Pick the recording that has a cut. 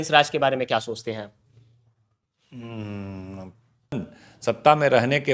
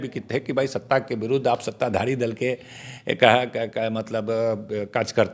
first; 1 cut; at 4.0 s

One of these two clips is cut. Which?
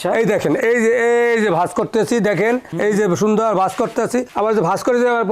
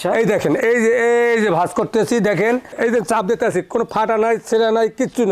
second; 1 cut; at 2.7 s

